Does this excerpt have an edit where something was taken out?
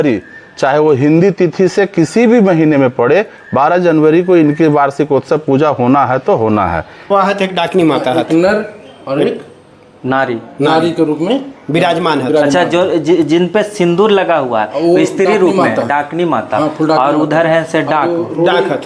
yes; 1 cut; at 7.0 s

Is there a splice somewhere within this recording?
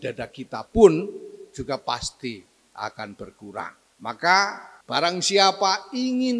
yes; 2 cuts; at 3.8 s, 4.7 s

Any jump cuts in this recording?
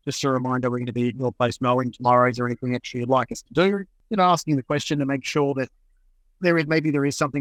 no; 0 cuts

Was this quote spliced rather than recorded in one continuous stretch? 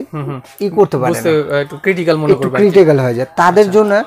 no; 0 cuts

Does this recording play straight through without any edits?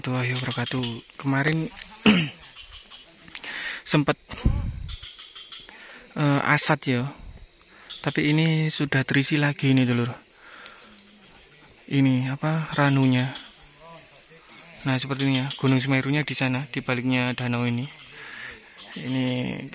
yes; 0 cuts

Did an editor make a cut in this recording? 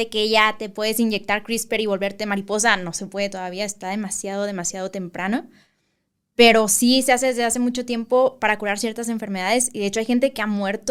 no; 0 cuts

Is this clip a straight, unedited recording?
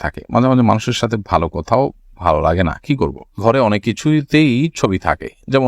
no; 1 cut; at 3.4 s

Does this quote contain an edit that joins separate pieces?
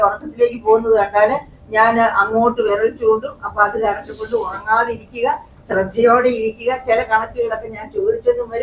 no; 0 cuts

